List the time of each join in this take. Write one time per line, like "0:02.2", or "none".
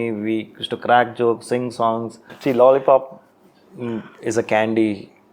0:02.3